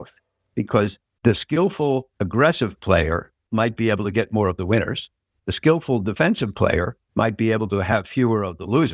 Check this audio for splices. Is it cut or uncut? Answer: cut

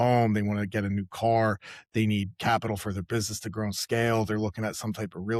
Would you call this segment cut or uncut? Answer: uncut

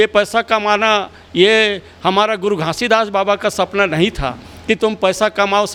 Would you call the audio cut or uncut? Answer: uncut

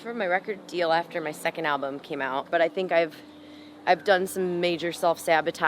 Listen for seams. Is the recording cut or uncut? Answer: cut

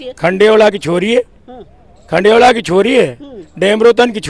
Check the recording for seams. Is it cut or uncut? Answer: uncut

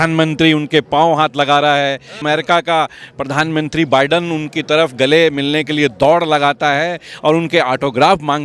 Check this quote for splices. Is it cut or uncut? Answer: cut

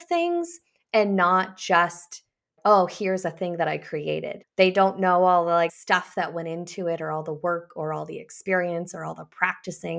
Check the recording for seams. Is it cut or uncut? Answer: cut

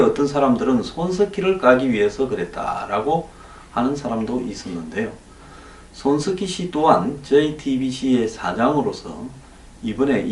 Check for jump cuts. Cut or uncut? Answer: cut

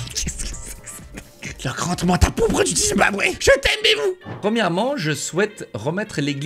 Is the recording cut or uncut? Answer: cut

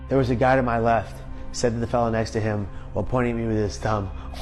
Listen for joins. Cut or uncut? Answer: uncut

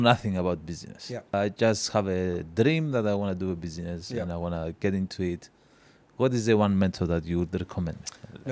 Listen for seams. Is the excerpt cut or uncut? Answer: cut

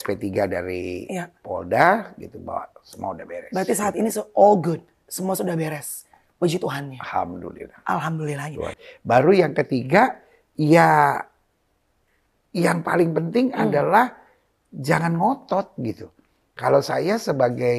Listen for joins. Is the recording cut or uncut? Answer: cut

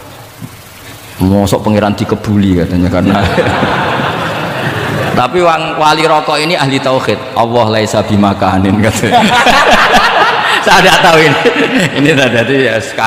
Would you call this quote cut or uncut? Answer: uncut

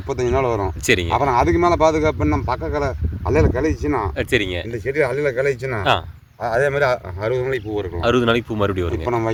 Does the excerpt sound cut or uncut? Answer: uncut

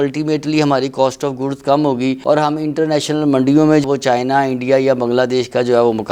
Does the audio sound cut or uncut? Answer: uncut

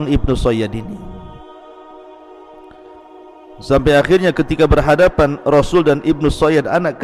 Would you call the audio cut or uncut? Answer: cut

